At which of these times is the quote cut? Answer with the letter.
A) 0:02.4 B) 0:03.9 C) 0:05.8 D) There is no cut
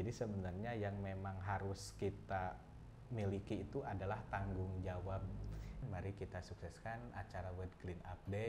C